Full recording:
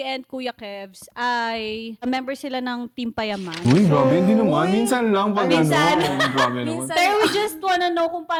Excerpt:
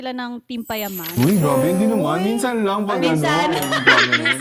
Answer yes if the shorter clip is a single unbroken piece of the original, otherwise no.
yes